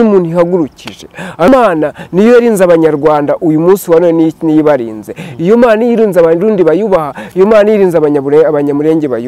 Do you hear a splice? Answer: yes; 1 cut; at 1.5 s

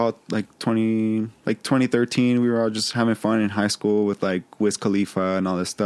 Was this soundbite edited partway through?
no; 0 cuts

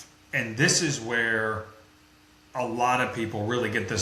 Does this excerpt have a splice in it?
no; 0 cuts

